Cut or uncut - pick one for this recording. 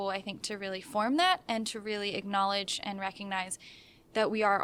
uncut